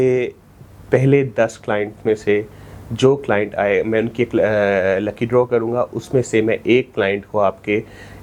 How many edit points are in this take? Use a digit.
0